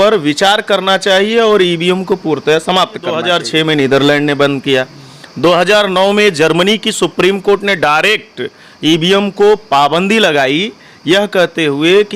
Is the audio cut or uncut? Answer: cut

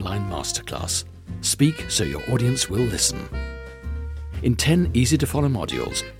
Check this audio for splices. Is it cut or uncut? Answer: uncut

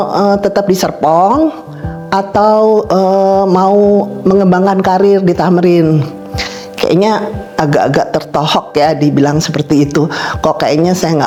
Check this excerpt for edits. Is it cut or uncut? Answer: uncut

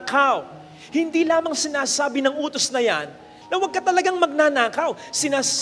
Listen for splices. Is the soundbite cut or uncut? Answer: uncut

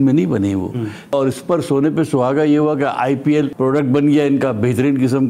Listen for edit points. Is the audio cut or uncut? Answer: cut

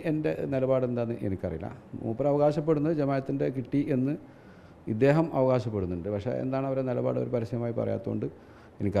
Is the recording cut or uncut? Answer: uncut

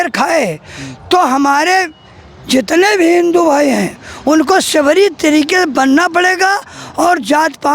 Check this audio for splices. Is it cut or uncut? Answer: uncut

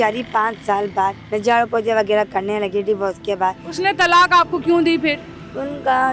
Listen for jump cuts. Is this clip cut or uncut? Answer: cut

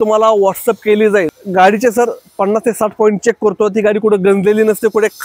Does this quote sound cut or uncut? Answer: cut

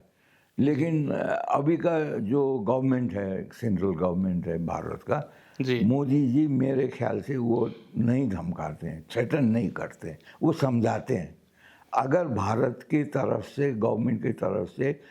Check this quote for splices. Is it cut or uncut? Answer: uncut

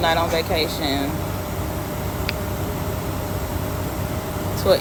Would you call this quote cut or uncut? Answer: uncut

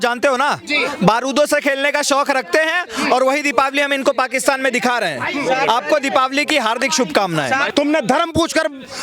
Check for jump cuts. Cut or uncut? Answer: cut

